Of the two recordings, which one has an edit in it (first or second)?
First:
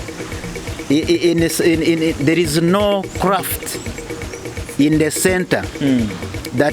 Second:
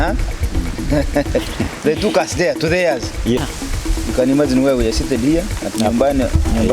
second